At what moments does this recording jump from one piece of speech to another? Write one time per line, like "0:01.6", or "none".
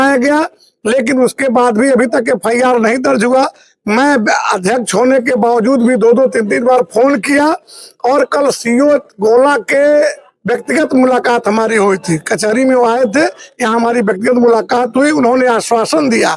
none